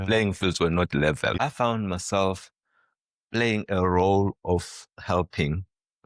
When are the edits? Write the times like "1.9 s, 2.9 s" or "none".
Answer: 1.4 s